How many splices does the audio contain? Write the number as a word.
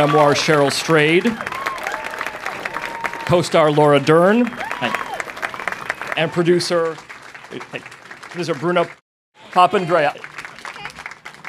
zero